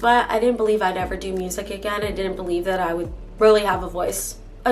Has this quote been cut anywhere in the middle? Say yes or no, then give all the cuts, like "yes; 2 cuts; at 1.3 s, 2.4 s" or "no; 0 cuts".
no; 0 cuts